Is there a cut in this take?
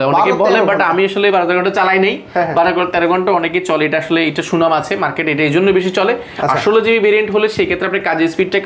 no; 0 cuts

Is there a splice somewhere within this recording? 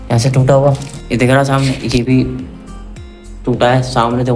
yes; 1 cut; at 0.9 s

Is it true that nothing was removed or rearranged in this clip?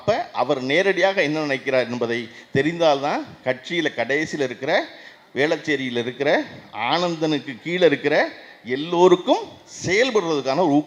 yes; 0 cuts

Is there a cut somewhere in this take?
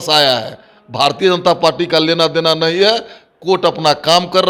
no; 0 cuts

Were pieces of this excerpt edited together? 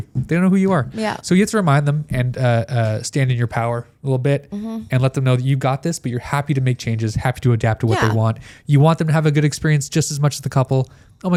no; 0 cuts

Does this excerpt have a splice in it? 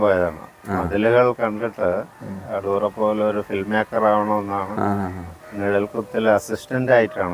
no; 0 cuts

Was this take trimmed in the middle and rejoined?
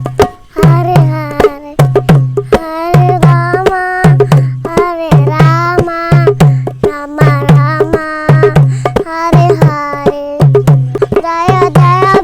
yes; 1 cut; at 10.9 s

